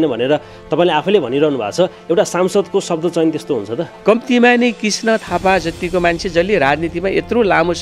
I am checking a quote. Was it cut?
yes; 1 cut; at 3.9 s

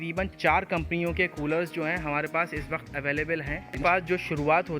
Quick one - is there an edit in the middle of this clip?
yes; 1 cut; at 3.8 s

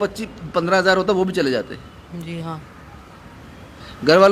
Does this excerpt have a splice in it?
no; 0 cuts

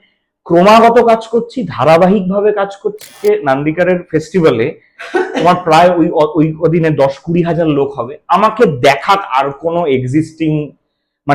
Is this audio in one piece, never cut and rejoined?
no; 1 cut; at 3.2 s

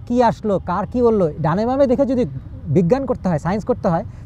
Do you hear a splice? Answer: no; 0 cuts

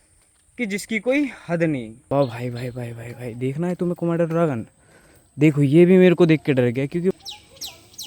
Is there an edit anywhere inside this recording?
yes; 2 cuts; at 1.9 s, 7.1 s

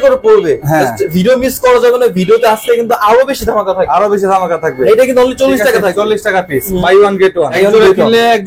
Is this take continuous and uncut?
no; 3 cuts; at 4.8 s, 6.7 s, 7.5 s

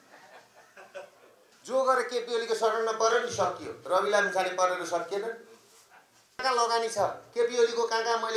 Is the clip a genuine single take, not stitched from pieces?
no; 2 cuts; at 1.5 s, 6.4 s

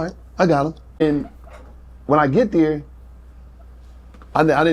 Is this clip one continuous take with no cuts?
no; 1 cut; at 1.0 s

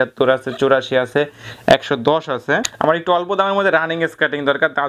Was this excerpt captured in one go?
no; 1 cut; at 2.7 s

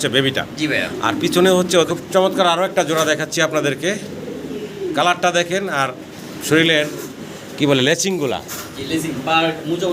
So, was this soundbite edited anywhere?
yes; 1 cut; at 1.9 s

